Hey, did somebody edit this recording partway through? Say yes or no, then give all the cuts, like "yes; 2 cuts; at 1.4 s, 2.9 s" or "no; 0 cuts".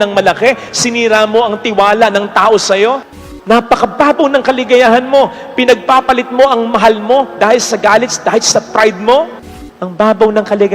yes; 2 cuts; at 3.2 s, 9.4 s